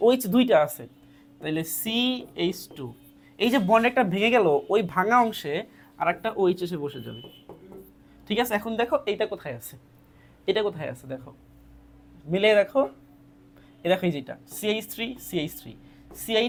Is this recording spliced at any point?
no; 0 cuts

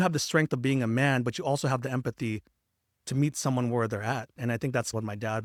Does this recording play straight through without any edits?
yes; 0 cuts

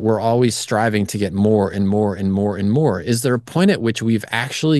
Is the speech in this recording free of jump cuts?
yes; 0 cuts

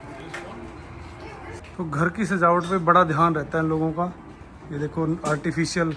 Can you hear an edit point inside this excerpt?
yes; 1 cut; at 1.6 s

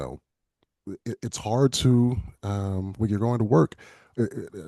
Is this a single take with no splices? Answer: no; 1 cut; at 2.3 s

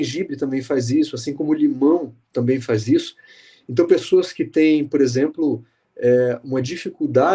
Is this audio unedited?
yes; 0 cuts

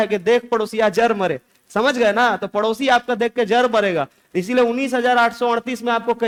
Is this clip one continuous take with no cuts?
yes; 0 cuts

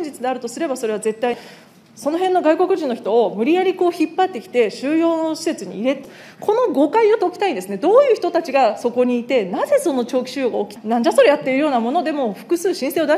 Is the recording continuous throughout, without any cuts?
no; 3 cuts; at 1.4 s, 6.0 s, 10.7 s

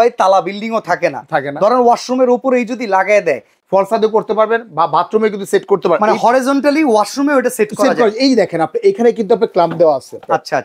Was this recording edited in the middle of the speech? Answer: yes; 1 cut; at 3.5 s

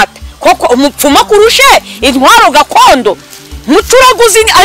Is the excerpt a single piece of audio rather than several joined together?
yes; 0 cuts

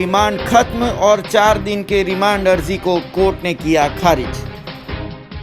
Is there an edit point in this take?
no; 0 cuts

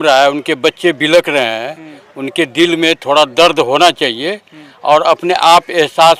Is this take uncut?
yes; 0 cuts

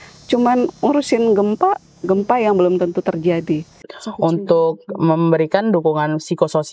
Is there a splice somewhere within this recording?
yes; 1 cut; at 3.9 s

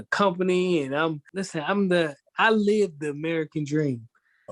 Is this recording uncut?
no; 1 cut; at 1.3 s

